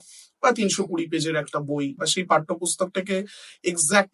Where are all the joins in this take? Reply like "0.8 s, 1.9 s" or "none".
2.0 s

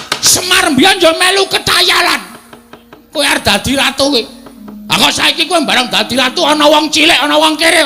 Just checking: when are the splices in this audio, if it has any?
1.4 s

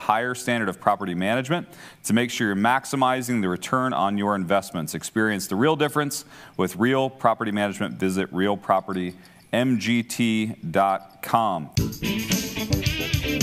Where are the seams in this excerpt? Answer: 11.7 s

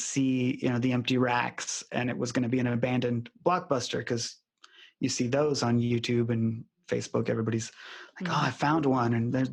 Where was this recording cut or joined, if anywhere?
none

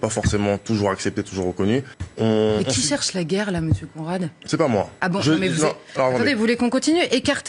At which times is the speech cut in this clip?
2.0 s, 4.9 s

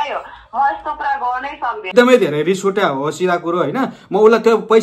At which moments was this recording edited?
1.9 s

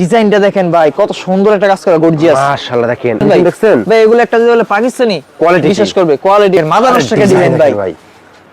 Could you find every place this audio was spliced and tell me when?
3.2 s, 6.6 s

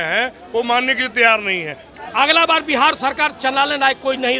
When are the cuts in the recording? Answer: 1.8 s

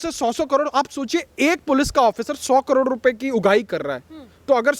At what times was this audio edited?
none

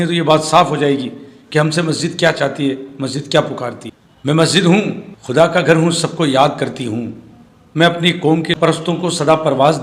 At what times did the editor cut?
8.5 s

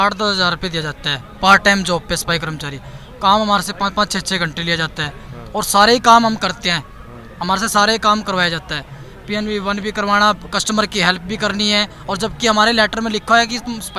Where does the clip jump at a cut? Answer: none

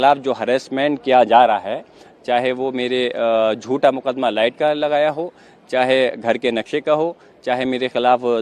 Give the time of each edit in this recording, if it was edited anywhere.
none

